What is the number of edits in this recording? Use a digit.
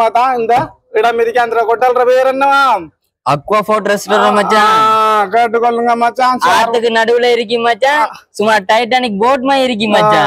0